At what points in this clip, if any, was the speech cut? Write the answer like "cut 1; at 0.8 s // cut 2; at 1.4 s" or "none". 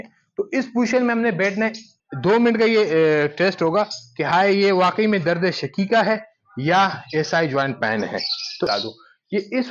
cut 1; at 1.9 s // cut 2; at 8.7 s